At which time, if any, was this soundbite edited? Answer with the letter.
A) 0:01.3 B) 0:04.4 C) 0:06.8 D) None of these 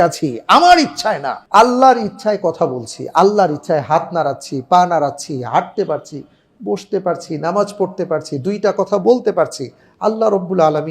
A